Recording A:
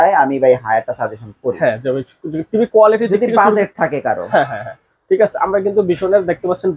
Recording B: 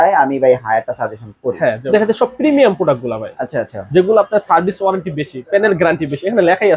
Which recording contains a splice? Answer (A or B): B